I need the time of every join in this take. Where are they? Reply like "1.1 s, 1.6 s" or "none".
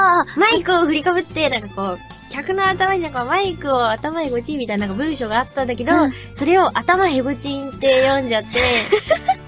5.8 s